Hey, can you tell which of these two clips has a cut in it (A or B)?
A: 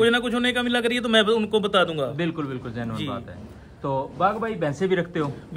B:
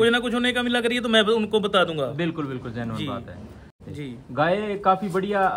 B